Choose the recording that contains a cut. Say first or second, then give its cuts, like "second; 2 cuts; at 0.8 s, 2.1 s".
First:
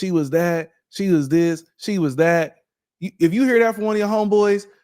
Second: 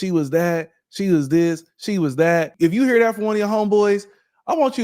second; 1 cut; at 2.5 s